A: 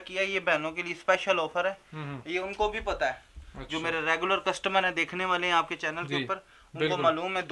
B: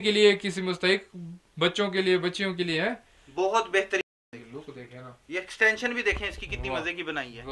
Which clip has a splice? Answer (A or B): B